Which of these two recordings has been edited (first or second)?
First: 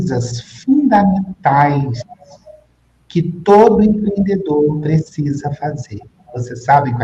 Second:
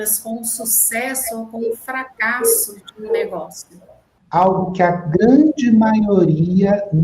second